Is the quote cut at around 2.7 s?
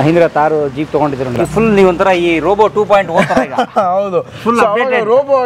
no; 1 cut; at 1.3 s

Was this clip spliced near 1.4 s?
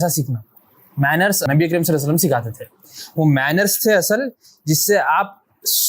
yes; 1 cut; at 1.4 s

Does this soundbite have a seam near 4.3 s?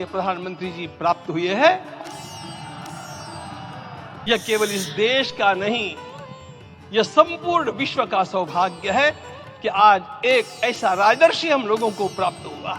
yes; 1 cut; at 4.3 s

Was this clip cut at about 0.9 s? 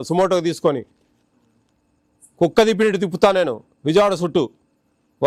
no; 0 cuts

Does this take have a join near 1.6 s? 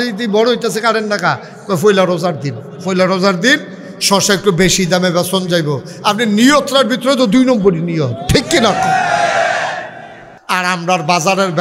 no; 1 cut; at 10.3 s

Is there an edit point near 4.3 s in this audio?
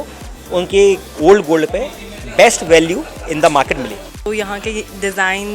yes; 1 cut; at 4.3 s

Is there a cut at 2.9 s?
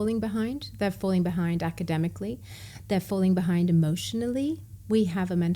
no; 0 cuts

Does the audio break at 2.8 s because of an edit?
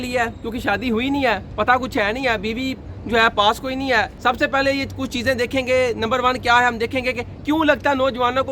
no; 1 cut; at 4.1 s

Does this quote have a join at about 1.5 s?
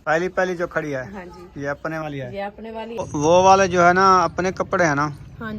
no; 1 cut; at 3.1 s

